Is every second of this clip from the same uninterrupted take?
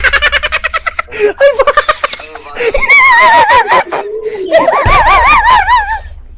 yes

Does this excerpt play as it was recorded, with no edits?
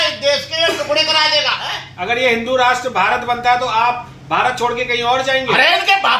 no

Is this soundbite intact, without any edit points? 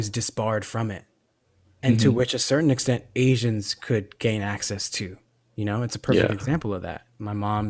yes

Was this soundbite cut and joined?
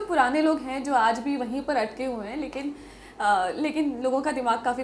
no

